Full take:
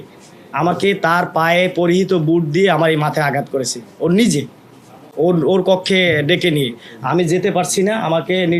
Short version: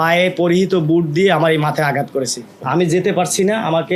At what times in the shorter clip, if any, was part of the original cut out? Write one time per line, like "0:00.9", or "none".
0:02.5